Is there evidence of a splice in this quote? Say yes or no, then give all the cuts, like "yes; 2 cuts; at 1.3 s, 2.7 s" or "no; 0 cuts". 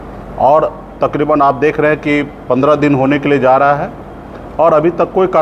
no; 0 cuts